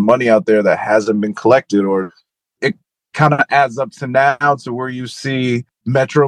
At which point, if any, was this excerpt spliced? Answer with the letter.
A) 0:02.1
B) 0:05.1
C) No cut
A